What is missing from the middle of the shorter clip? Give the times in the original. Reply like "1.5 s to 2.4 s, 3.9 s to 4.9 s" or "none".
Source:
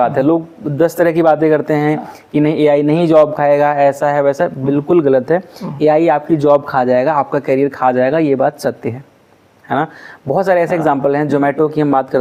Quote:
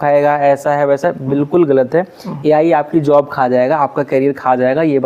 none